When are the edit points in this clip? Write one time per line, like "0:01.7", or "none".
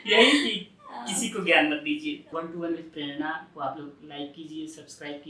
0:02.3